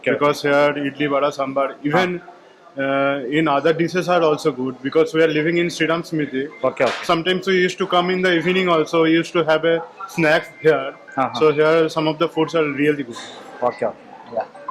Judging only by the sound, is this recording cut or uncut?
uncut